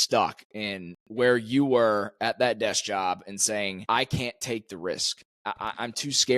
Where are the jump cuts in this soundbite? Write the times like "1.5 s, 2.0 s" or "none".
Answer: 3.8 s, 5.3 s